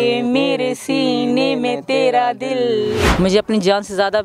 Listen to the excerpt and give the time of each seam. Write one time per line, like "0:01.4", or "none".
0:03.1

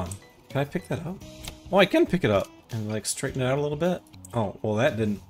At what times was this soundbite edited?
0:02.6
0:04.2

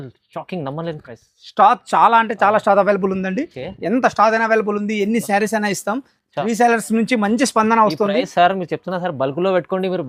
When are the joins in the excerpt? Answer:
none

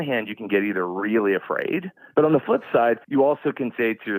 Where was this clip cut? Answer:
0:02.0

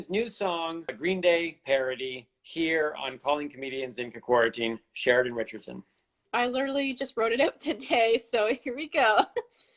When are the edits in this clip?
0:00.9
0:06.1

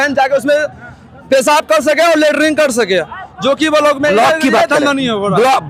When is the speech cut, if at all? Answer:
none

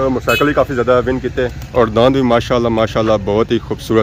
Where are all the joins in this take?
none

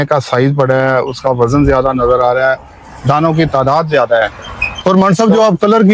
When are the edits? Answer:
none

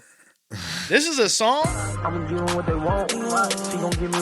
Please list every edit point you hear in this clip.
0:01.7

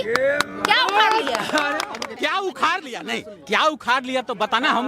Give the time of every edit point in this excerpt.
0:02.0

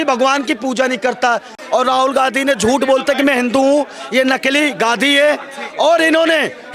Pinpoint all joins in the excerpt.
0:01.6

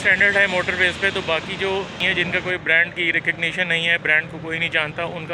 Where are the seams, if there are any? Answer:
0:02.0

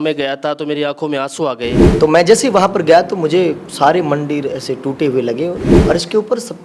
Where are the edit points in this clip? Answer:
0:01.9
0:05.7

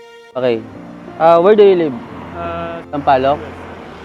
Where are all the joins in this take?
0:02.8

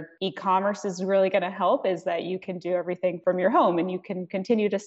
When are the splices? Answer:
none

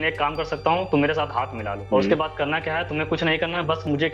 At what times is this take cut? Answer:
none

